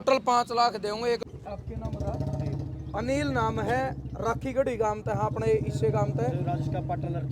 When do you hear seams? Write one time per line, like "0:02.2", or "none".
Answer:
0:01.2